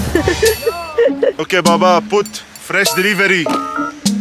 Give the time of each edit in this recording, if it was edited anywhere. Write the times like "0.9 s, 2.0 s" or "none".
1.4 s